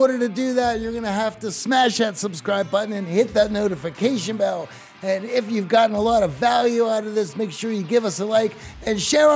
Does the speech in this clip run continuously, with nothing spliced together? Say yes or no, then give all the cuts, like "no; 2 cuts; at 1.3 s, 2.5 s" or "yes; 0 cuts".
yes; 0 cuts